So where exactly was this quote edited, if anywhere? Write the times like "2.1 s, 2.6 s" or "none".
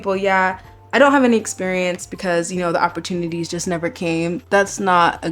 4.4 s